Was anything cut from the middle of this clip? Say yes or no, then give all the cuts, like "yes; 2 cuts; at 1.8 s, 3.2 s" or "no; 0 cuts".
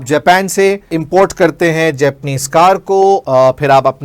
yes; 2 cuts; at 1.0 s, 3.2 s